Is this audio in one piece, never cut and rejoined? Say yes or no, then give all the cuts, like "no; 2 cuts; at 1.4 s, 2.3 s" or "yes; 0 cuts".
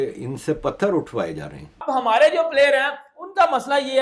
no; 1 cut; at 1.7 s